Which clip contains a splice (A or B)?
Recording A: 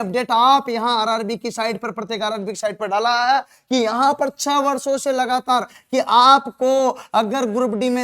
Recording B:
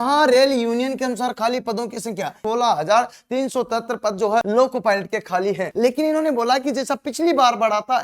B